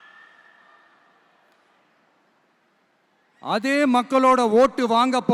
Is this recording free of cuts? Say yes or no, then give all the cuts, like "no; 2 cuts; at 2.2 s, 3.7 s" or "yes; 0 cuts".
yes; 0 cuts